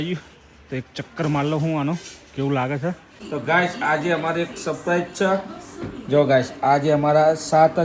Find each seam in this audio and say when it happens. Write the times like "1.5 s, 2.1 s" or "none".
3.1 s